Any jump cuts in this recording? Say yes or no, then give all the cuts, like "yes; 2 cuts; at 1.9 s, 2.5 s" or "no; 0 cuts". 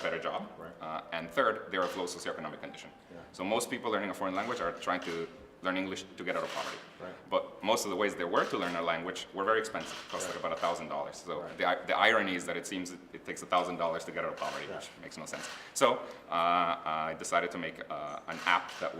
yes; 1 cut; at 11.5 s